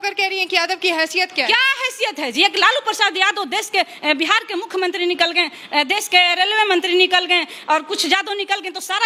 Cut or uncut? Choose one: uncut